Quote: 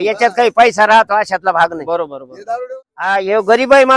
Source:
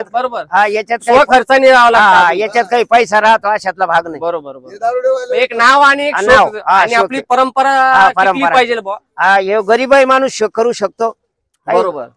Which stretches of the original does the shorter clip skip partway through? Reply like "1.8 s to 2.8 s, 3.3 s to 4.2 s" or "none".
5.0 s to 8.8 s